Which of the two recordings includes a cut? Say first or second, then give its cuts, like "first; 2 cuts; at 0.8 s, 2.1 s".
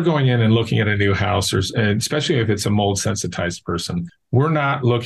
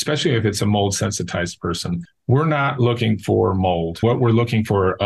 second; 1 cut; at 4.0 s